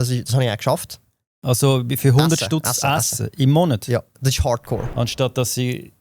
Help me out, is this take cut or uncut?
cut